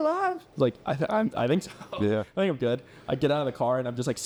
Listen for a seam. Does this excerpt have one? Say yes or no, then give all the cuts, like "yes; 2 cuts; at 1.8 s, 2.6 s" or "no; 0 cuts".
no; 0 cuts